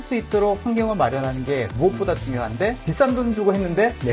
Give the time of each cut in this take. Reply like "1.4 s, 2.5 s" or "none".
2.8 s